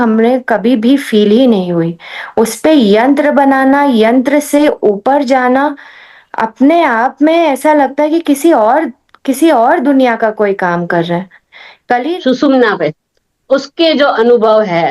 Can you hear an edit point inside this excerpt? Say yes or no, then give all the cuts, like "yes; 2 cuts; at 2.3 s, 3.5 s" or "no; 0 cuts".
yes; 1 cut; at 12.0 s